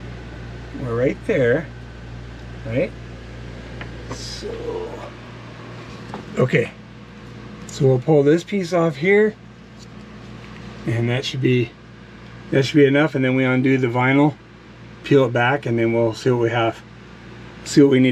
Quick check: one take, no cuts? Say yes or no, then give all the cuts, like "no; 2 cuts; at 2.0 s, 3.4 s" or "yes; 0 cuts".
yes; 0 cuts